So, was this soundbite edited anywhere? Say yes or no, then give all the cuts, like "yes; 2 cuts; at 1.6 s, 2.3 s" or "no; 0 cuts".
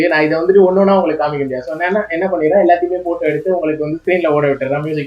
no; 0 cuts